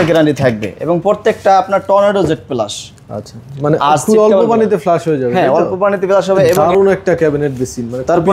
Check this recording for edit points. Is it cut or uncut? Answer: cut